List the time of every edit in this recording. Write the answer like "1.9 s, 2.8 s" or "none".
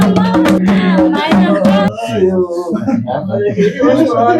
1.9 s

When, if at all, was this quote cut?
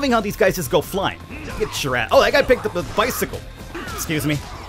3.7 s

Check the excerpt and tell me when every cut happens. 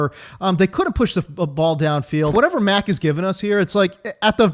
2.3 s

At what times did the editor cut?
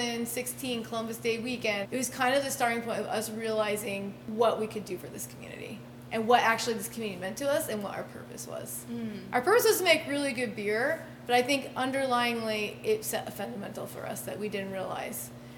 1.8 s

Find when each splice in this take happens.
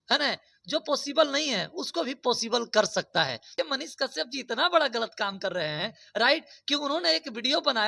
3.5 s

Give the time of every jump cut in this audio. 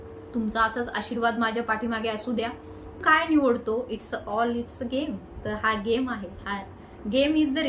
3.0 s

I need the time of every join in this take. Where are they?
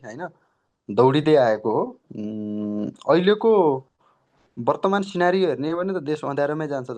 none

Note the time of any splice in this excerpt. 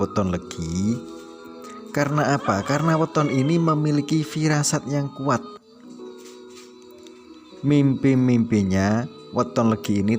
5.5 s, 7.6 s

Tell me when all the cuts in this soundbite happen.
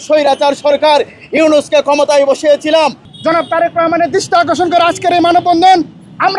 3.1 s

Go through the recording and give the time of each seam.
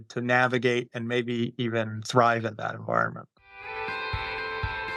3.4 s

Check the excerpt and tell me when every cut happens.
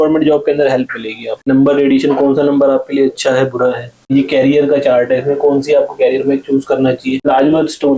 1.5 s, 4.1 s, 7.3 s

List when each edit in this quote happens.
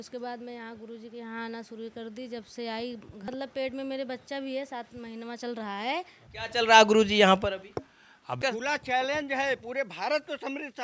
3.3 s, 6.2 s, 8.4 s

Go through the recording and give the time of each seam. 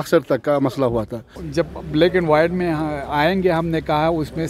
1.4 s

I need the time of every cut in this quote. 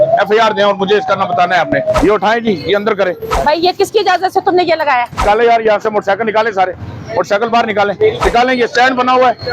2.0 s, 3.3 s, 5.1 s, 8.2 s

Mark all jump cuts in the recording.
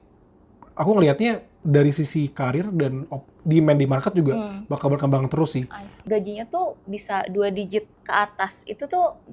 6.0 s

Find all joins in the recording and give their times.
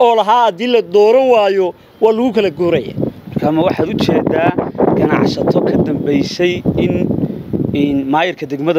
none

